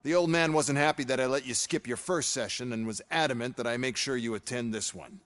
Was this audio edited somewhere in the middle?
yes; 1 cut; at 2.0 s

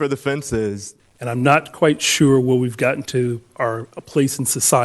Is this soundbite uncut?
no; 1 cut; at 0.9 s

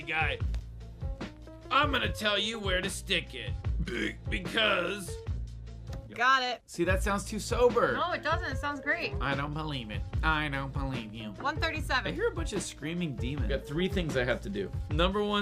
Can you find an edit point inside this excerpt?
yes; 1 cut; at 6.1 s

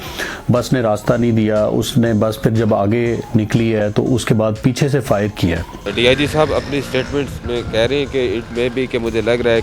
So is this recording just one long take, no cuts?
no; 1 cut; at 5.7 s

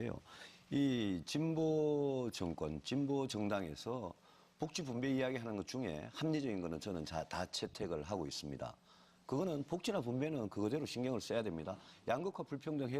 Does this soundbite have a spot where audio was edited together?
yes; 1 cut; at 7.1 s

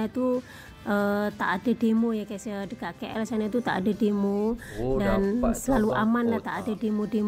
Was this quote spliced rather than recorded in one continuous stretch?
no; 0 cuts

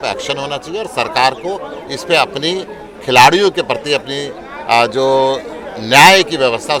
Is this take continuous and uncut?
yes; 0 cuts

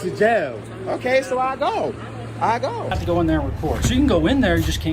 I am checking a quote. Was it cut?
yes; 1 cut; at 3.0 s

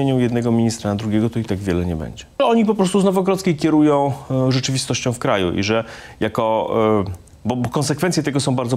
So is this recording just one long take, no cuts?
no; 1 cut; at 2.4 s

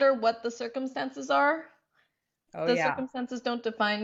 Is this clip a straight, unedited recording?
yes; 0 cuts

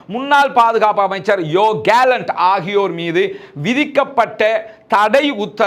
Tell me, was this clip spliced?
no; 0 cuts

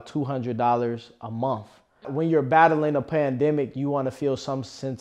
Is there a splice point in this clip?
yes; 1 cut; at 2.0 s

